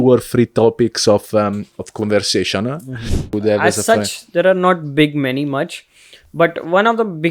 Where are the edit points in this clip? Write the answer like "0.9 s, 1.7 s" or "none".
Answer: 3.3 s